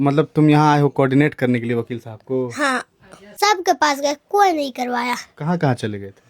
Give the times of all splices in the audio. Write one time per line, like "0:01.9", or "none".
0:03.2